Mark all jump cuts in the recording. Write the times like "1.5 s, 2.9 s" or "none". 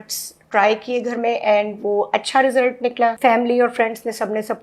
3.2 s